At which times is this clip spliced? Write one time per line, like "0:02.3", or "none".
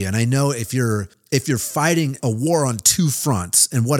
0:01.1
0:02.2